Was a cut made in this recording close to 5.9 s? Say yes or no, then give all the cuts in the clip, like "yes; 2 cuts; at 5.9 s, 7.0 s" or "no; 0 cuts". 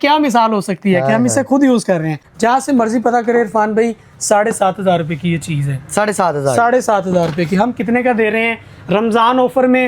no; 1 cut; at 2.2 s